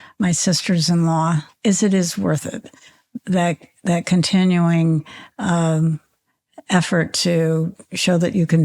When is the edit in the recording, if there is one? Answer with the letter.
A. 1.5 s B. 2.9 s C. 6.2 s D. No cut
A